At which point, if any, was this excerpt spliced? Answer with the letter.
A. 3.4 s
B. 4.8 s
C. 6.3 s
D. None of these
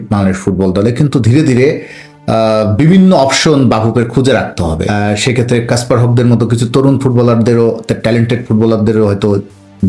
B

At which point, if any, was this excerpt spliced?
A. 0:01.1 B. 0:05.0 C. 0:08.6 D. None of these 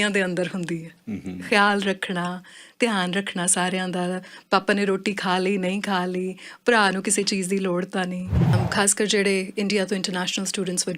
C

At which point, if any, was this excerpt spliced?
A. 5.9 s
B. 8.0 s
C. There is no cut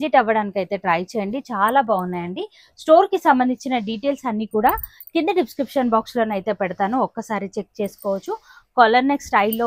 C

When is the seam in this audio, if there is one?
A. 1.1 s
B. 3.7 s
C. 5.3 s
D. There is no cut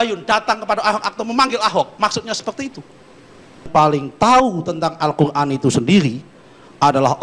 B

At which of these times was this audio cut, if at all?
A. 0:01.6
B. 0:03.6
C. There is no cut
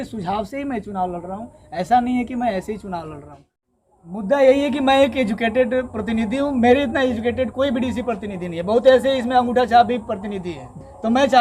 B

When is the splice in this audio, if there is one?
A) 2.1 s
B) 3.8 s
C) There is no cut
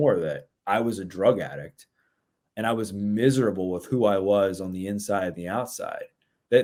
C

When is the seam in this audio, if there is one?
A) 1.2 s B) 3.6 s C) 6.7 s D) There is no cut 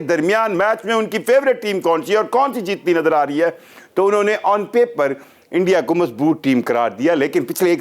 D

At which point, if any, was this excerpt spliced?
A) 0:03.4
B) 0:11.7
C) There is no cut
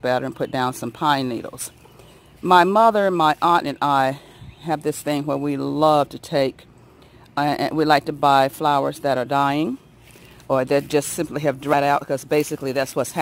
B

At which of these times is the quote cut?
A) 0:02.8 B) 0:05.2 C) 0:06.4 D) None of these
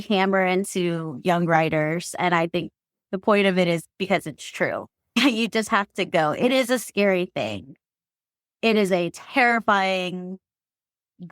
B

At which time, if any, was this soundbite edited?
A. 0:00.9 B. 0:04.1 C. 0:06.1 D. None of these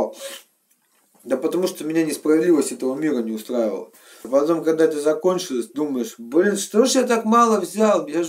B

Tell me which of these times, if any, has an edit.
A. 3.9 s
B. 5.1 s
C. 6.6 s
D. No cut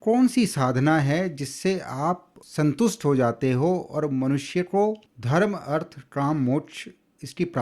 B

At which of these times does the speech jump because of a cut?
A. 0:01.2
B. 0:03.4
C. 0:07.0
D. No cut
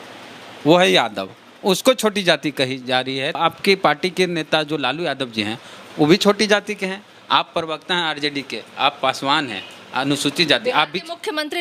B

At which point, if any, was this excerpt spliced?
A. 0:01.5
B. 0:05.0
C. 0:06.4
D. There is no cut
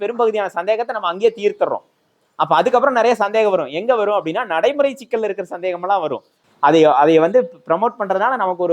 C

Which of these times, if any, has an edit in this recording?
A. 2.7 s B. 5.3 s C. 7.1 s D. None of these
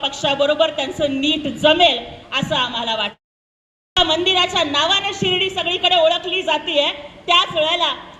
D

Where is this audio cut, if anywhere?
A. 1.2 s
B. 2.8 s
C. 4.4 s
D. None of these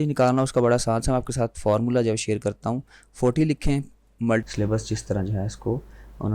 C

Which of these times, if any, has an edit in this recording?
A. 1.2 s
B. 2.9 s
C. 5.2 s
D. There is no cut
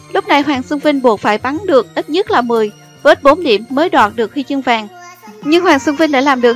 B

